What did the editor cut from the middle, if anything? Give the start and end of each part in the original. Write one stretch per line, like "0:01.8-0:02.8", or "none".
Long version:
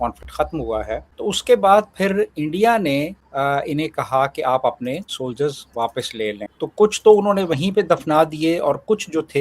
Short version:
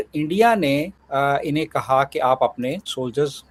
none